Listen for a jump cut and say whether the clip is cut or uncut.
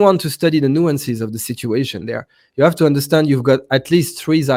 uncut